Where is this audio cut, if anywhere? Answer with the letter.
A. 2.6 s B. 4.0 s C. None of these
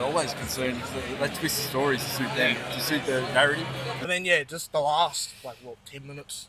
B